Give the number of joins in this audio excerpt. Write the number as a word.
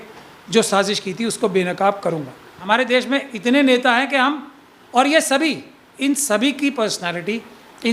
one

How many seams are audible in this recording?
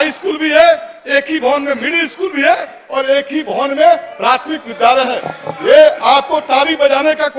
zero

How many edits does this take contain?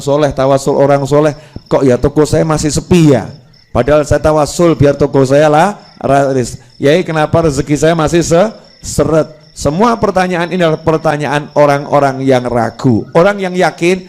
zero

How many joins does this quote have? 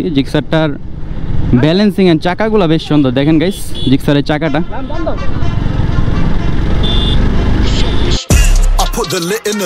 one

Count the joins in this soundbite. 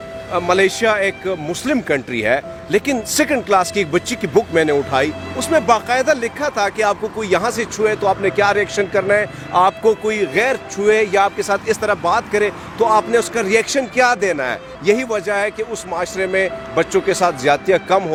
zero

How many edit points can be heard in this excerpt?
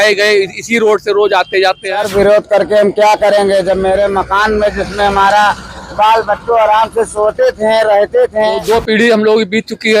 two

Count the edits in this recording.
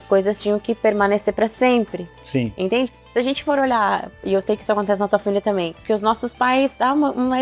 one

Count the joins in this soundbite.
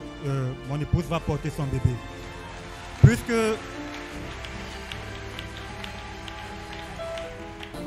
zero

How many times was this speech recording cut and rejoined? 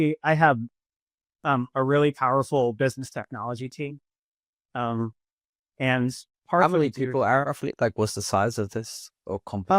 one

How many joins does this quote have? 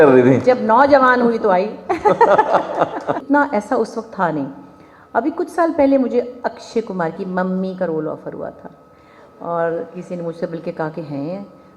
one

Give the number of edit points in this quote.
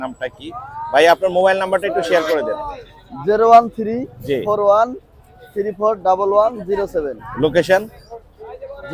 zero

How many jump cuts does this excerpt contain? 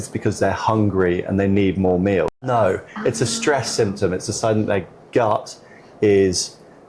one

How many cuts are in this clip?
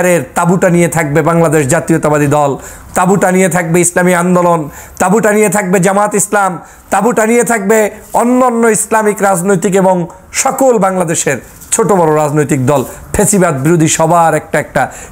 zero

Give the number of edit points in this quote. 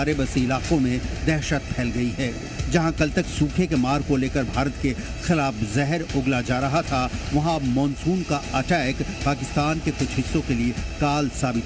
zero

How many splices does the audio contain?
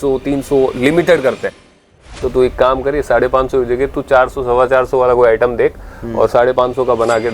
one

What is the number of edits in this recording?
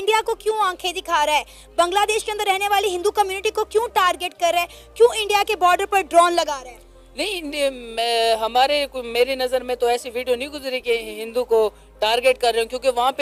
zero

